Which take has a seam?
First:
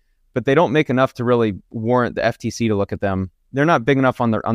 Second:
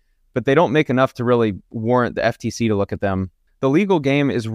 second; 1 cut; at 3.4 s

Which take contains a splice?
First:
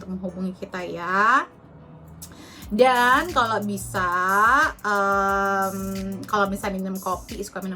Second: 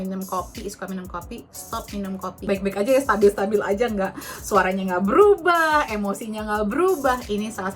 second; 1 cut; at 2.4 s

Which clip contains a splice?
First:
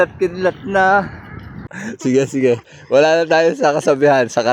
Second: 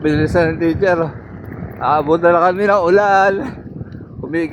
first; 1 cut; at 1.8 s

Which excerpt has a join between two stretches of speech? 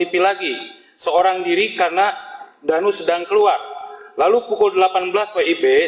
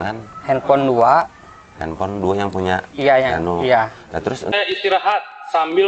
second; 1 cut; at 4.5 s

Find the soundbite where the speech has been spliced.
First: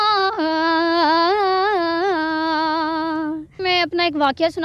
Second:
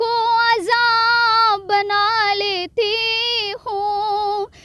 first; 1 cut; at 3.5 s

